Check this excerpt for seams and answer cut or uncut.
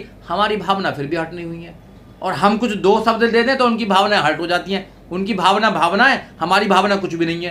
uncut